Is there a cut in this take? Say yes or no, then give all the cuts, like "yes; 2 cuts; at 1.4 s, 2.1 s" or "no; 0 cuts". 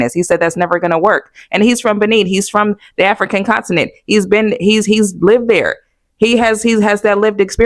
no; 0 cuts